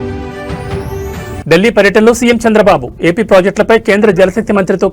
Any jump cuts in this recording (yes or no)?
yes